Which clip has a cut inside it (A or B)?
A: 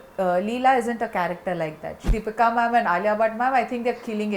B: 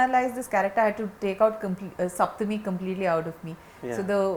A